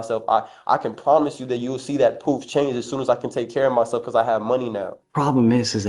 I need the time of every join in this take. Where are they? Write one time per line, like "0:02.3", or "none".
0:05.0